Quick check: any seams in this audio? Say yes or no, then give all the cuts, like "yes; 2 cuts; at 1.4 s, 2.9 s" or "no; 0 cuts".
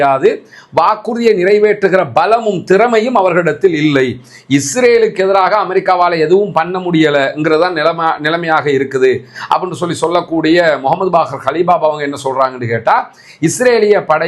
no; 0 cuts